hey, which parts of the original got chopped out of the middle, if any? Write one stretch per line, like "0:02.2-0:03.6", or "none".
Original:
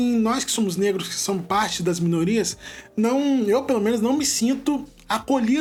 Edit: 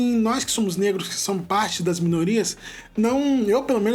none